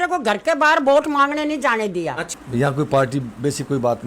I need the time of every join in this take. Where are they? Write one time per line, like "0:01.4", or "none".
0:02.2